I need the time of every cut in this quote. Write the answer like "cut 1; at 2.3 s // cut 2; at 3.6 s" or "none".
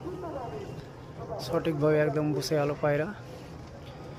none